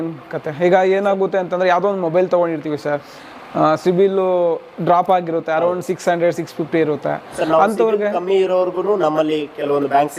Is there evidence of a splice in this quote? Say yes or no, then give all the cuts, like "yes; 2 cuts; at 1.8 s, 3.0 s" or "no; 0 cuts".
no; 0 cuts